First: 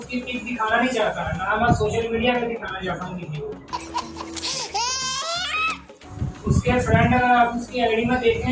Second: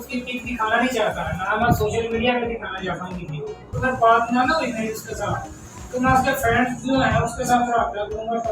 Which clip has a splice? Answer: second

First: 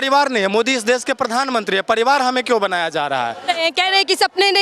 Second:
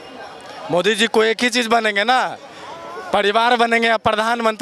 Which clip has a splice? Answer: first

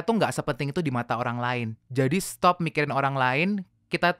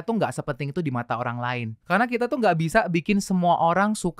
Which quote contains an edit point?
second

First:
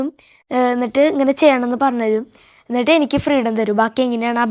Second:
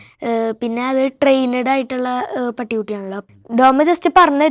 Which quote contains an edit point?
second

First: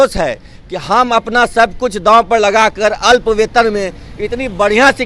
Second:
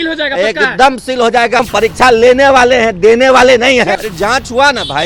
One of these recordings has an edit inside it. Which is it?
second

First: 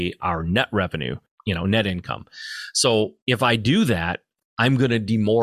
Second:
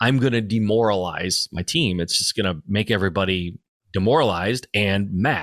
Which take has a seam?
first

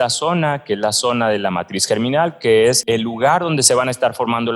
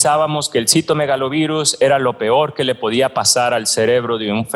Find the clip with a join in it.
first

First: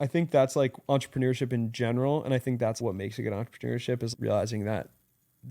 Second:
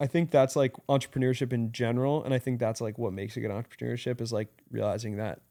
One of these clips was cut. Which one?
first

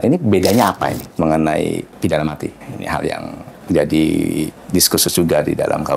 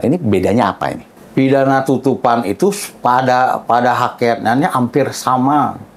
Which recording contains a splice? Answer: first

